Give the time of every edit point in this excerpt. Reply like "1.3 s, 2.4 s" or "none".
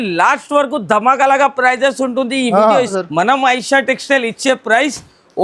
3.0 s